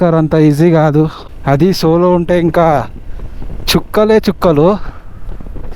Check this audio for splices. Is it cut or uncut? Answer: cut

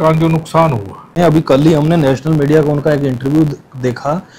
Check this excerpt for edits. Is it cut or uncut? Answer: cut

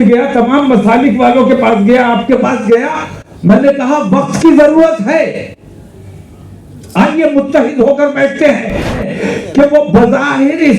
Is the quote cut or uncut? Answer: cut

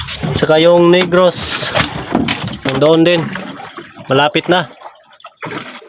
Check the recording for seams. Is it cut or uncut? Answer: cut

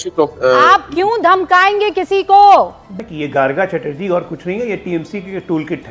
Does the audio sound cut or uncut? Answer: cut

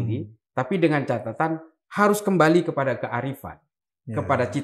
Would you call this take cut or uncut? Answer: uncut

